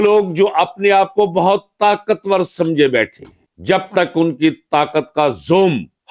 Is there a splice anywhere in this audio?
no; 0 cuts

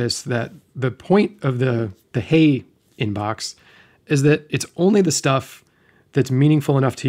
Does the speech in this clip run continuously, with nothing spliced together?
yes; 0 cuts

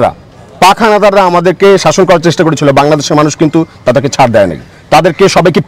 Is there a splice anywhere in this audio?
no; 0 cuts

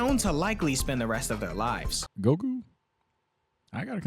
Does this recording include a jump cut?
yes; 1 cut; at 2.0 s

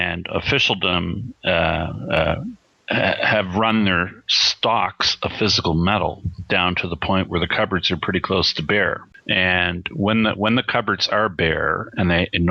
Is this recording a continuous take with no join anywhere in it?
no; 1 cut; at 0.9 s

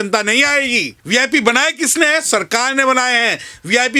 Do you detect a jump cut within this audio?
yes; 1 cut; at 0.9 s

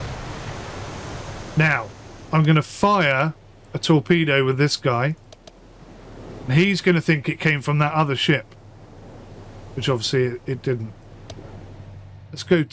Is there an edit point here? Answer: no; 0 cuts

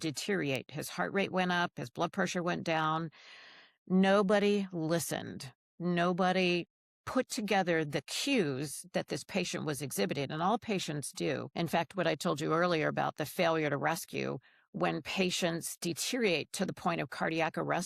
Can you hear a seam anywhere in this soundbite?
yes; 1 cut; at 11.5 s

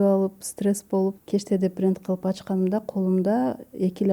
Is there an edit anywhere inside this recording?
yes; 1 cut; at 1.2 s

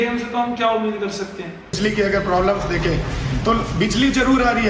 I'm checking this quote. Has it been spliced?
yes; 1 cut; at 1.8 s

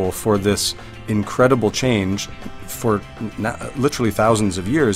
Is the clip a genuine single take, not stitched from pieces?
yes; 0 cuts

